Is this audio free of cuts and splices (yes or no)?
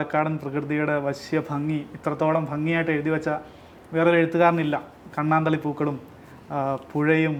yes